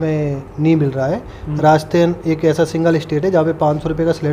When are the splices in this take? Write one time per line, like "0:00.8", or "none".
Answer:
none

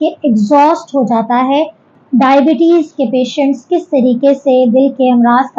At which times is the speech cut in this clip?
0:01.9

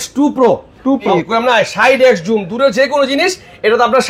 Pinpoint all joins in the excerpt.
0:01.2

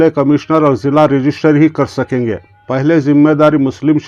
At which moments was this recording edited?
none

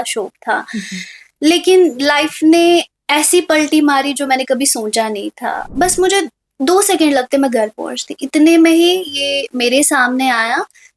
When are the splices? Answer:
0:05.7

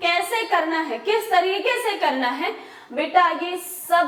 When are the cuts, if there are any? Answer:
none

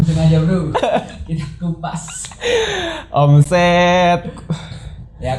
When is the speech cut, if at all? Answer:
none

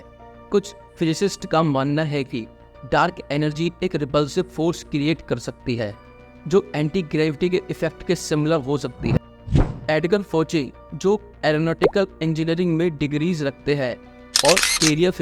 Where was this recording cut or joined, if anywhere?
0:09.2

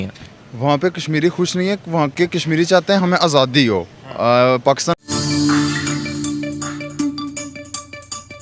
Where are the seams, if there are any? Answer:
0:05.0

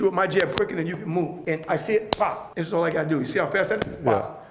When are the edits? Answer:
0:01.4
0:02.5

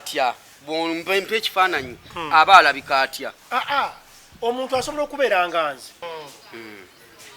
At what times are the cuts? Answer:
0:06.1

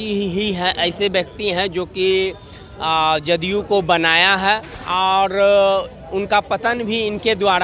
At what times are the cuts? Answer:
0:04.8

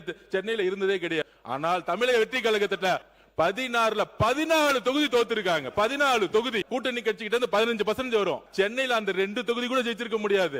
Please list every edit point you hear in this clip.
0:01.3
0:03.1
0:06.7
0:08.5

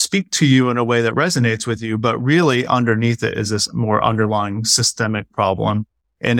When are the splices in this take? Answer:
none

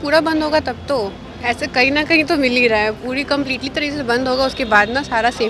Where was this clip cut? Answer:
none

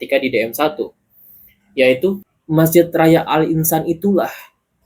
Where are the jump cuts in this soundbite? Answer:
0:02.2

